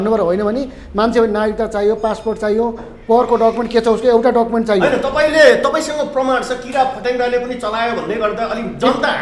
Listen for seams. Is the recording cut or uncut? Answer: uncut